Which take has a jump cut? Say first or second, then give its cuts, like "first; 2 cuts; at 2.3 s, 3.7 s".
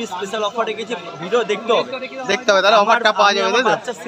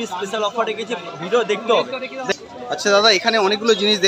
second; 1 cut; at 2.3 s